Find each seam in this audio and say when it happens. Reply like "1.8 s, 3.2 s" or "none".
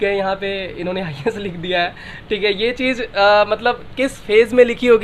none